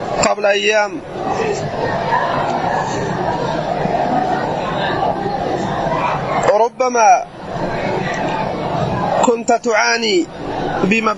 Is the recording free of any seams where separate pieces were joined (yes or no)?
yes